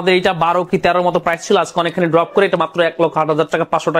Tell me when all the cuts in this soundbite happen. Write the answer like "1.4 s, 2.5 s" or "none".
none